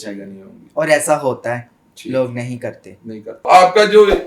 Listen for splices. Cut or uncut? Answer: cut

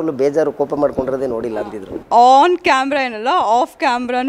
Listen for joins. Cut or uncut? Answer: cut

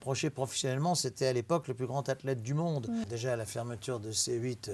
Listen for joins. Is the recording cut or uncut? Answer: cut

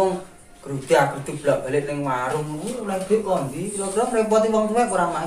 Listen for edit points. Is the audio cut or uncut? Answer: uncut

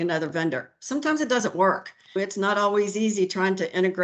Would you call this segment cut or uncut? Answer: cut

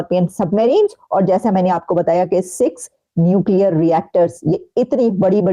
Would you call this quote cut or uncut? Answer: uncut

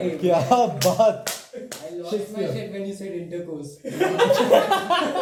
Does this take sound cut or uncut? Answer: uncut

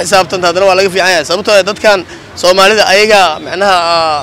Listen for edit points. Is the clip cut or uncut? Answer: uncut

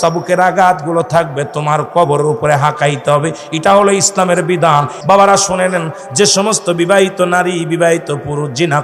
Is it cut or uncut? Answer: cut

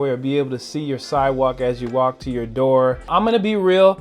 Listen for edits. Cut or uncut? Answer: cut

